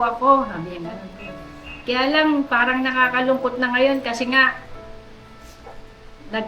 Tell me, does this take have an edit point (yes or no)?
no